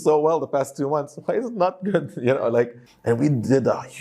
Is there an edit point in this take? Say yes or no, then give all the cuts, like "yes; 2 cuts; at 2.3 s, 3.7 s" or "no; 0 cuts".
yes; 1 cut; at 2.9 s